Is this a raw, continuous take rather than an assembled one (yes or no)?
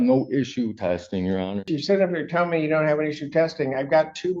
no